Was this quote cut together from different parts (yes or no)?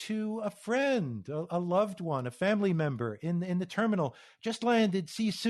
no